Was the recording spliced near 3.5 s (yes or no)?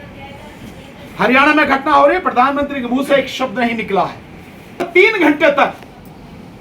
no